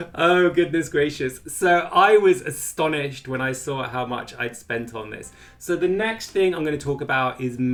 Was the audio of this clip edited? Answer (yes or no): no